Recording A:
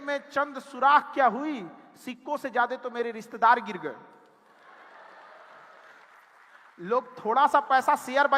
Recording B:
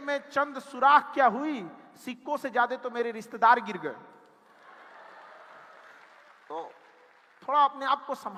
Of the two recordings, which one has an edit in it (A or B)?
A